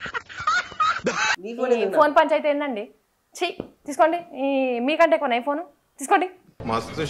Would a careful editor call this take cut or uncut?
cut